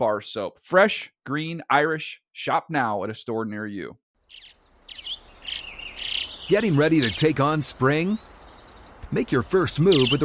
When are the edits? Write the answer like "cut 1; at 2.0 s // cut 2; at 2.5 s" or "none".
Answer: cut 1; at 4.0 s